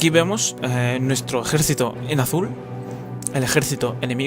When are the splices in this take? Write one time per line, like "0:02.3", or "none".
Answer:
0:01.3